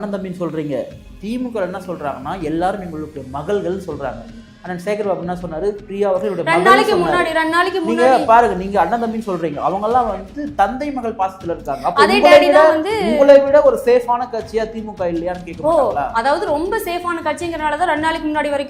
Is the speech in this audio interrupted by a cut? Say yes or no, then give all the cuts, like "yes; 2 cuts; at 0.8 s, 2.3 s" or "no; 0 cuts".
no; 0 cuts